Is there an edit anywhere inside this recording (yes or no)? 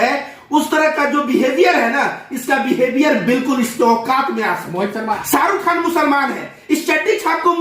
yes